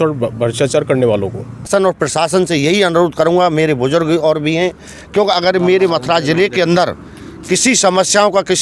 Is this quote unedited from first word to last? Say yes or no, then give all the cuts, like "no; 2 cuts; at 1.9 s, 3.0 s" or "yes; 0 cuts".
no; 1 cut; at 1.7 s